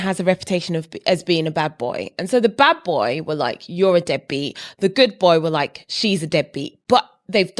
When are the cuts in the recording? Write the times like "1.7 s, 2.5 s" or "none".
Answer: none